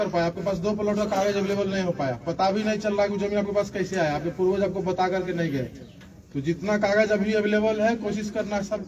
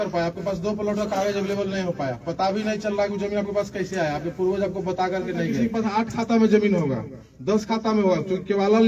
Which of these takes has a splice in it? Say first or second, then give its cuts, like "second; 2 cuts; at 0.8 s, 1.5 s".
second; 1 cut; at 5.5 s